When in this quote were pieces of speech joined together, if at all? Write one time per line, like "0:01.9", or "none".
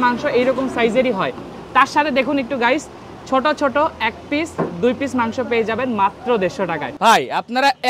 0:06.9